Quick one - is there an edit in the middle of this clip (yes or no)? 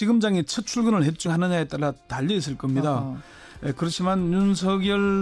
no